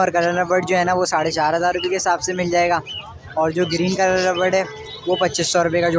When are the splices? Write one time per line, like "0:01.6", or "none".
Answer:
none